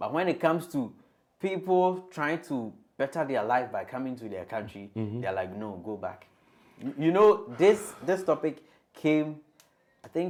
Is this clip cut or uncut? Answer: uncut